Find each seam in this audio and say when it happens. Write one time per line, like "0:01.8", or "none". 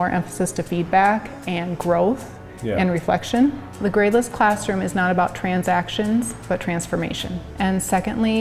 0:03.7
0:07.5

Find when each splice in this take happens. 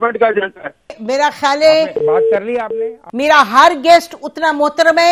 0:01.0
0:03.0

